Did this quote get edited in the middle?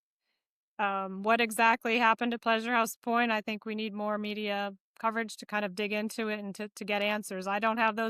no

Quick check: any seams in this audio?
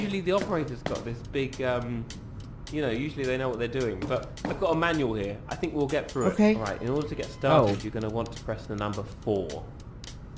no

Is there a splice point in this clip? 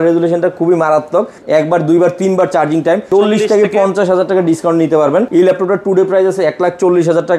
yes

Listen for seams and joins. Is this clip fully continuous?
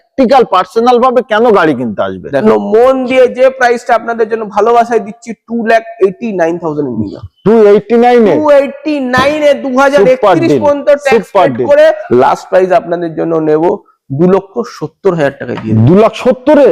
no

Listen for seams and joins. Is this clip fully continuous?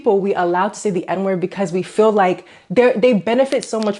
yes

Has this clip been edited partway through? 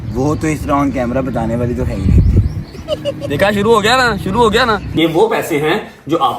yes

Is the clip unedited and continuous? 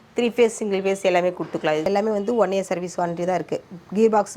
no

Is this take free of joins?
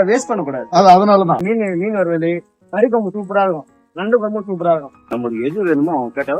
no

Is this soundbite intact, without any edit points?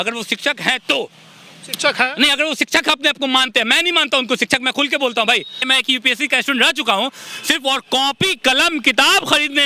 no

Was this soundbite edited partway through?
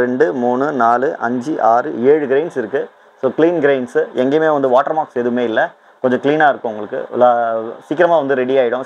no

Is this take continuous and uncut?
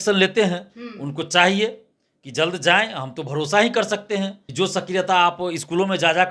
no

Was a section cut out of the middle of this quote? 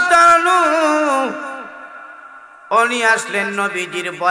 no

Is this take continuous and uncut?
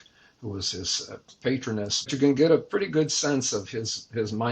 no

